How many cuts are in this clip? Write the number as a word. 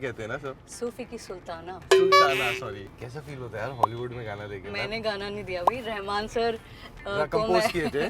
two